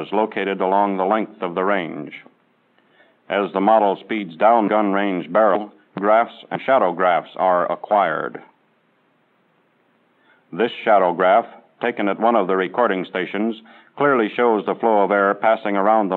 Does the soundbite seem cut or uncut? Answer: uncut